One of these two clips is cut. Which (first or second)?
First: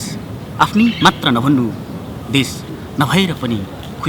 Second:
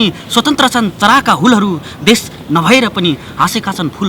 second